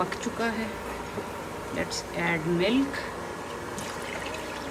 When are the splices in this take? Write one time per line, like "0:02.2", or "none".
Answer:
none